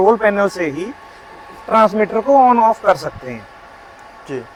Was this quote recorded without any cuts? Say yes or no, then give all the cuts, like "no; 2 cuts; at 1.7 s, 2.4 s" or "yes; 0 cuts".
yes; 0 cuts